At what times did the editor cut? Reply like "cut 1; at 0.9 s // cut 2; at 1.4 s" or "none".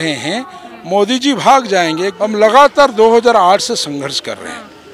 cut 1; at 2.1 s